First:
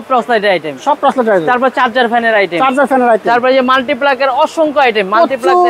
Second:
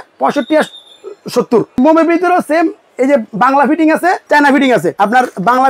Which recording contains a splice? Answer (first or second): second